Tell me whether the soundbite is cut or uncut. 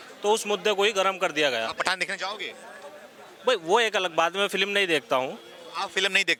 uncut